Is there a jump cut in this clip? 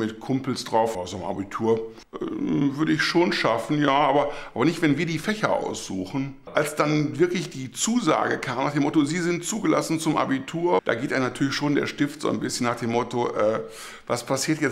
yes; 4 cuts; at 0.9 s, 2.0 s, 6.4 s, 10.8 s

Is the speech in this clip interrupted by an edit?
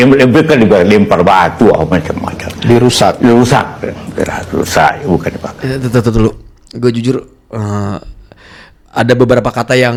no; 0 cuts

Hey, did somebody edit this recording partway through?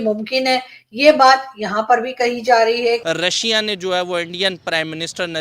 yes; 1 cut; at 3.0 s

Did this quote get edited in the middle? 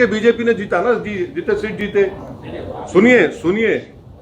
no; 0 cuts

